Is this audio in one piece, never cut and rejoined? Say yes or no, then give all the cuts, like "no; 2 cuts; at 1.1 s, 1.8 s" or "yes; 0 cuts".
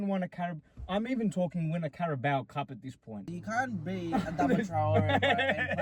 no; 1 cut; at 3.3 s